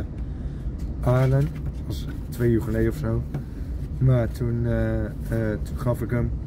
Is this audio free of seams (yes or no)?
yes